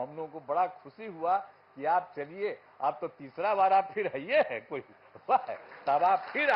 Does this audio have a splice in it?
no; 0 cuts

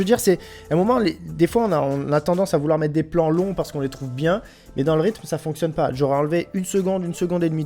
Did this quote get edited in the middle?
no; 0 cuts

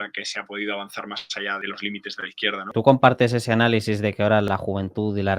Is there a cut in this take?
yes; 3 cuts; at 1.6 s, 2.7 s, 4.5 s

